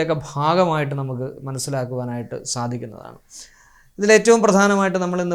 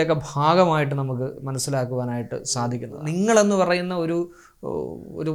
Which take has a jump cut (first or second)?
second